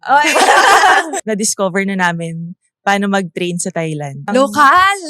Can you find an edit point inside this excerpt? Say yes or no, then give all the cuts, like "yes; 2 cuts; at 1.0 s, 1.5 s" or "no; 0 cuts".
yes; 2 cuts; at 1.2 s, 4.3 s